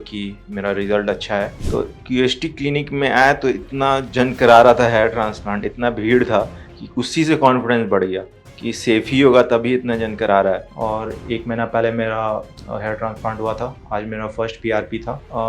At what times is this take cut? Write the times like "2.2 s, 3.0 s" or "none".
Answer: 1.6 s, 10.7 s